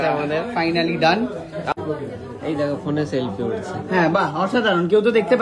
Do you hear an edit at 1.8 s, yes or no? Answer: yes